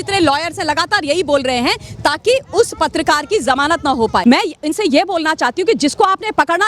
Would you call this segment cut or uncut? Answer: cut